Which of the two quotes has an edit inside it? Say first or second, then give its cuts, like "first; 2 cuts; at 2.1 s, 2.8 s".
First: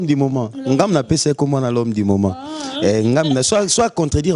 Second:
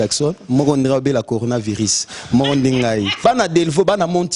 second; 1 cut; at 3.2 s